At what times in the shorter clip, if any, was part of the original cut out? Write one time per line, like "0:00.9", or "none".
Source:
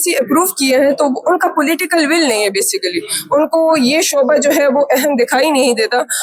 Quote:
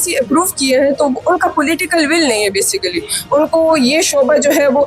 none